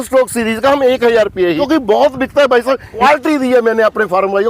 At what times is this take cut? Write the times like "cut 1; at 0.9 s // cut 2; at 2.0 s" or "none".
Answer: cut 1; at 1.6 s // cut 2; at 3.0 s